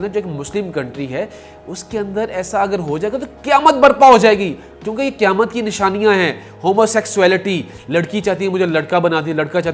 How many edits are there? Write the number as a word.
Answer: one